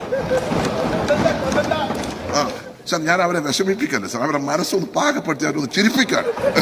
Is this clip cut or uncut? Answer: cut